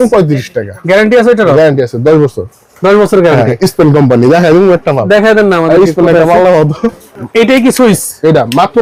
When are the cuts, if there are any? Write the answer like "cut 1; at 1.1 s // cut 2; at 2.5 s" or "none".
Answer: none